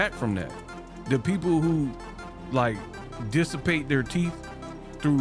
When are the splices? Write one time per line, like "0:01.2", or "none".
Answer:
none